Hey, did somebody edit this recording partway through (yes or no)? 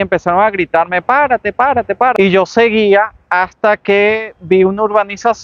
yes